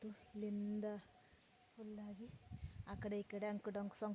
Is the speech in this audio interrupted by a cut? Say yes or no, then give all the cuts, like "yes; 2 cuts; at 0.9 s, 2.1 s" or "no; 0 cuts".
no; 0 cuts